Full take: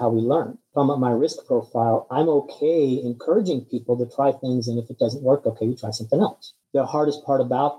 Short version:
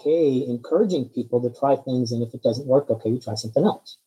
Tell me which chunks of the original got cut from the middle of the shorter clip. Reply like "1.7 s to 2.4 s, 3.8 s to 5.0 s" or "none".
none